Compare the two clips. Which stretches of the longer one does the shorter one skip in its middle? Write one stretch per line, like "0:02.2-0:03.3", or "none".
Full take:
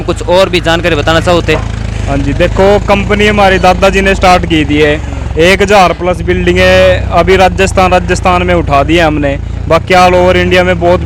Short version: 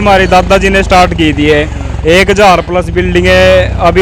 none